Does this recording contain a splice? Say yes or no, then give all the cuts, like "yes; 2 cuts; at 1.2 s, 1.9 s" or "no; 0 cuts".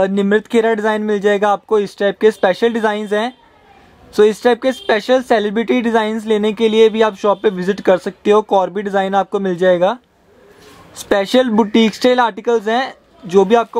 no; 0 cuts